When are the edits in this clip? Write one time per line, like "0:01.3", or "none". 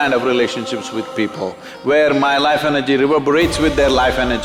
none